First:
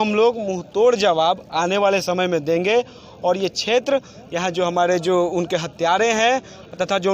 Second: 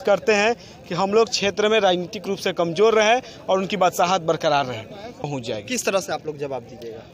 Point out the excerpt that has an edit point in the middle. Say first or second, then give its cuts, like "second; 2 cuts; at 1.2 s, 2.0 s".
second; 1 cut; at 5.2 s